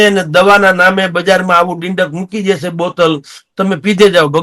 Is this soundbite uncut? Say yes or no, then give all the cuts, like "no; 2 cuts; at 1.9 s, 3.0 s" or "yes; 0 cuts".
yes; 0 cuts